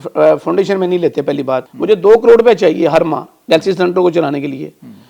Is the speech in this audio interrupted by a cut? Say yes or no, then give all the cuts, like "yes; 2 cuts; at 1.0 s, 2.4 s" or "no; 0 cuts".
yes; 1 cut; at 1.6 s